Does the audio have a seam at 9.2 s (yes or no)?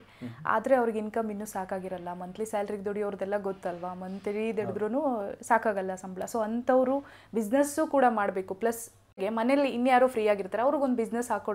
yes